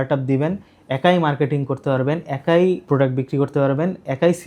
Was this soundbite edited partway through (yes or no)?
no